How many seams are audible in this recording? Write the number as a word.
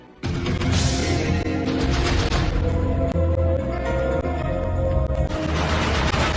zero